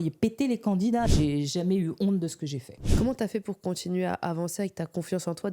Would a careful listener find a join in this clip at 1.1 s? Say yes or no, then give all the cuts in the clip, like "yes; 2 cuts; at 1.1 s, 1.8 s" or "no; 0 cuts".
yes; 2 cuts; at 1.1 s, 2.9 s